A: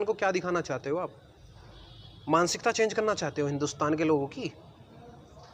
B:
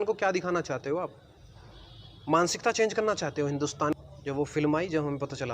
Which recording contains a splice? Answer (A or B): B